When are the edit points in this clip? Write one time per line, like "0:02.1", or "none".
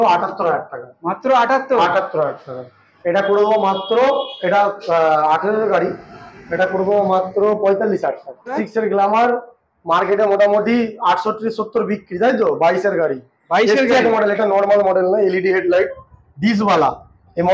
0:02.9
0:08.6